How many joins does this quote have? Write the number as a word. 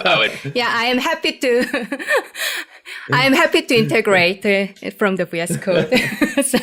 zero